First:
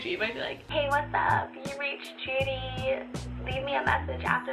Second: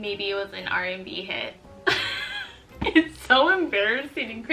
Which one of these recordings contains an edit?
second; 1 cut; at 1.7 s

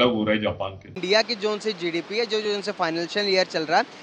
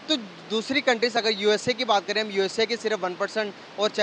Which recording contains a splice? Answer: first; 1 cut; at 1.0 s

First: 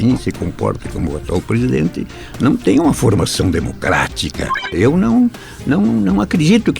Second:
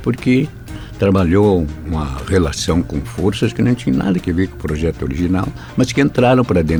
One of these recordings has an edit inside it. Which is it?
first; 1 cut; at 4.7 s

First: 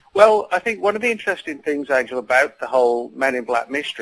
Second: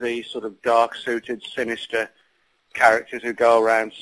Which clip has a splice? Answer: first; 1 cut; at 1.4 s

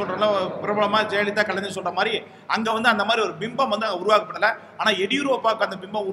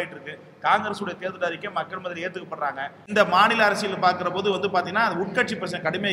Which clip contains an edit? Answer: second; 1 cut; at 3.0 s

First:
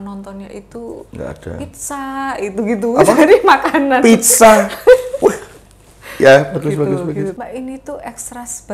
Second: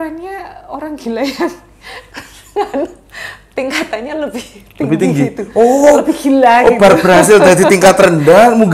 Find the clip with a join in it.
first; 1 cut; at 7.4 s

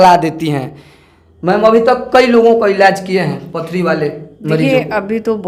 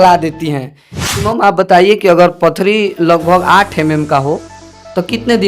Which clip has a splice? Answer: second; 1 cut; at 1.2 s

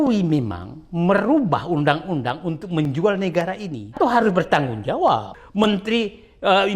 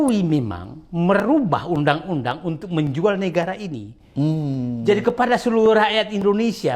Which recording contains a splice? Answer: first; 2 cuts; at 3.9 s, 5.4 s

